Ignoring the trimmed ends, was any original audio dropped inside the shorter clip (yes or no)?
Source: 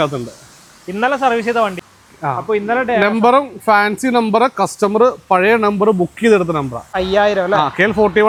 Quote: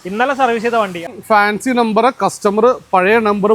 yes